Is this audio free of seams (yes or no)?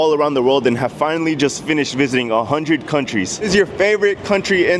no